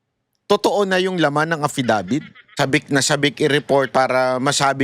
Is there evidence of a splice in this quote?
yes; 1 cut; at 2.4 s

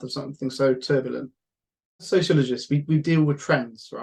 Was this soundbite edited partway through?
yes; 1 cut; at 2.0 s

